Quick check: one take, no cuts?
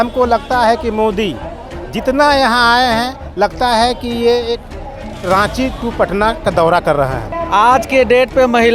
no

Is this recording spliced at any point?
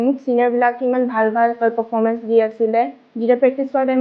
yes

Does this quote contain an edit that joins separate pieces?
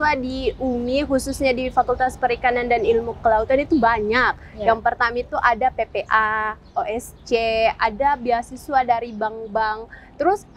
no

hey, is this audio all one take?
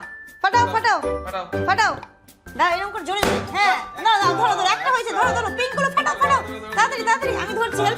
no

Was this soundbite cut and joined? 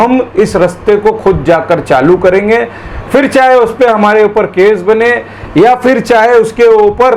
no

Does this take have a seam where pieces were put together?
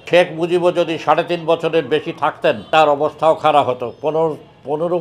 yes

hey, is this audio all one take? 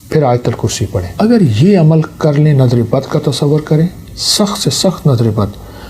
no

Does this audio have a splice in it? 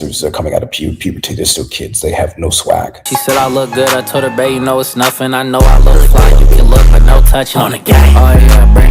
yes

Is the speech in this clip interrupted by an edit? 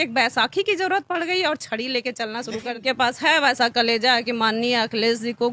yes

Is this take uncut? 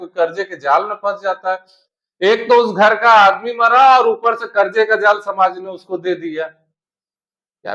yes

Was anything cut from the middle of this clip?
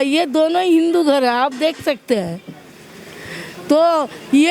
no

